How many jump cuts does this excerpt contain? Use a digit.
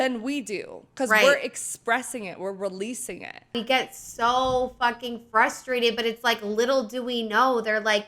1